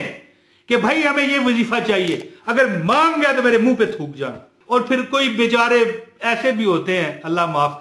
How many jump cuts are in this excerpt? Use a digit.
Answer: 1